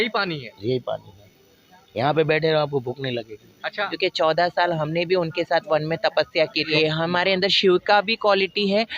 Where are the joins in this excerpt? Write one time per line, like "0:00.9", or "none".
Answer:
0:03.8
0:06.7